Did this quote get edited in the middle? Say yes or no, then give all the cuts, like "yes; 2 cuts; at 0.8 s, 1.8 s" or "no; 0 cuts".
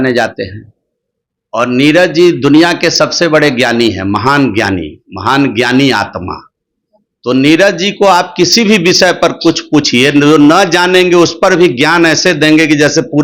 no; 0 cuts